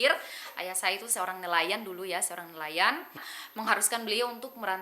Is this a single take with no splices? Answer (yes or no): no